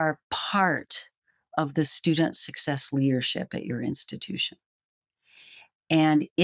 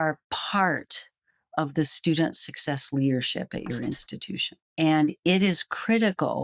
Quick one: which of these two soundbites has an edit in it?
second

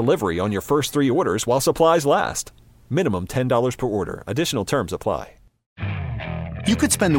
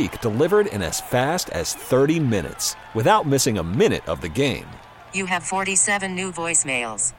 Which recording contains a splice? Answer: first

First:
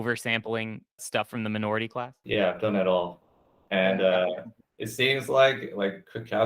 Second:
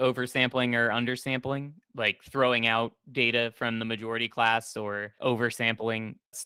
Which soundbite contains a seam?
first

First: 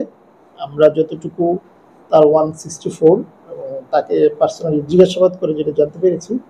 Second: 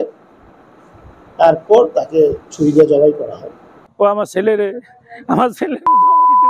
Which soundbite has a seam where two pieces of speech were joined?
second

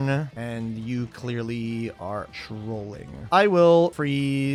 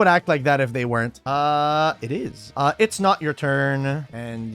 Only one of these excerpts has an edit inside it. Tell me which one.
second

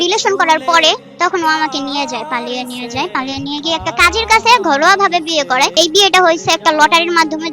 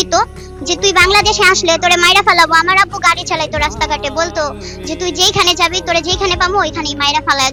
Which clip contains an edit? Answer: first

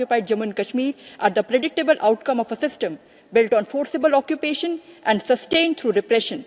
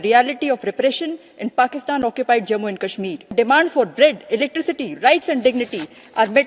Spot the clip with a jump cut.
second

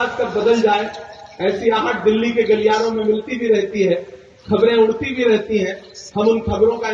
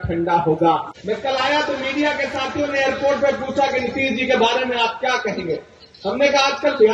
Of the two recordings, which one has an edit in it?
second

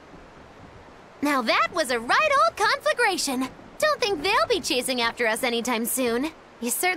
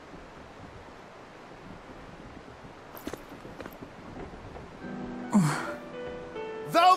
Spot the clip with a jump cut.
first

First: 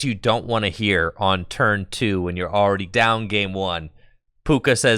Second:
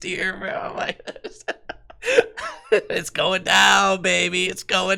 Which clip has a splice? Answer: first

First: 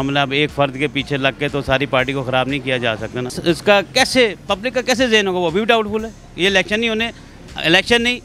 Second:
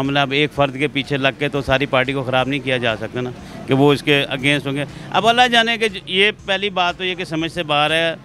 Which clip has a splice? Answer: first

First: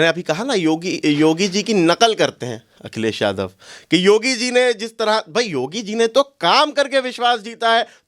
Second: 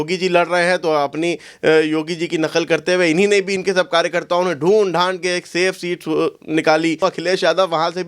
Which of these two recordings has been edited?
second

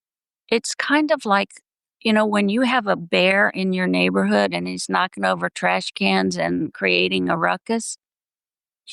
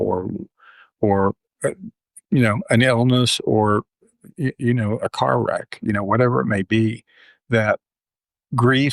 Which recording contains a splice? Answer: second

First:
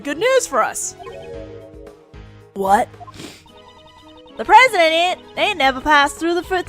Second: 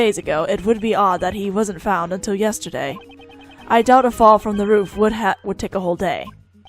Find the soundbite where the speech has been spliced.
first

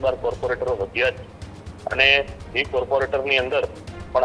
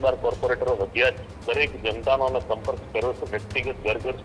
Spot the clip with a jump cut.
second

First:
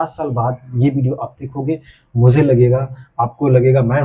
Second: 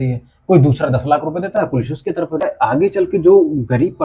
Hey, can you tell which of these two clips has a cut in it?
second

